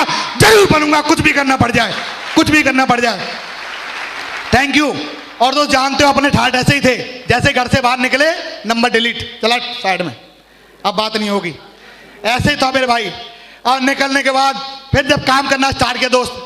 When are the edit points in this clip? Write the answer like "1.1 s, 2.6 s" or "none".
none